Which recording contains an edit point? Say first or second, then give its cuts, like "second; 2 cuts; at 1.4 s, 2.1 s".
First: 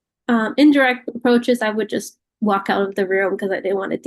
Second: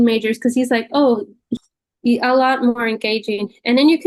second; 1 cut; at 1.4 s